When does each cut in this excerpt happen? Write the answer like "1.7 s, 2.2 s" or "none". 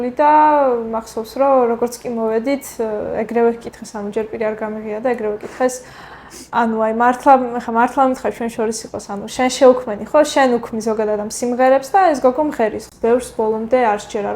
12.8 s